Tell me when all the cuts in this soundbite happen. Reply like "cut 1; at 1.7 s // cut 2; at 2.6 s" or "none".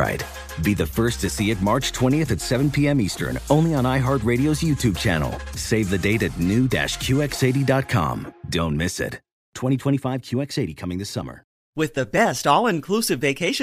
cut 1; at 11.6 s